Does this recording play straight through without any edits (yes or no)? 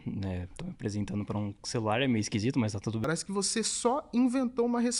no